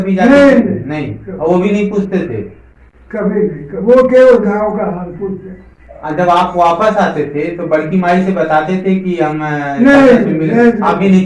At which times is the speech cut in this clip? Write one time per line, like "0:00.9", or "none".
0:06.0